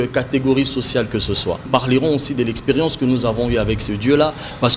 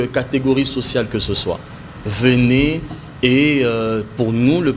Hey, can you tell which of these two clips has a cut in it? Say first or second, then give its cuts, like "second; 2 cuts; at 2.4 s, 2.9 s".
first; 1 cut; at 1.7 s